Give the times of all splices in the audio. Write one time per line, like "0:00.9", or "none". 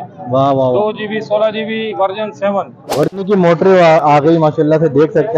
0:03.1